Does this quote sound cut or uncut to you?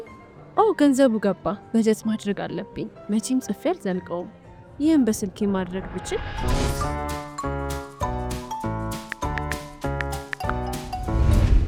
uncut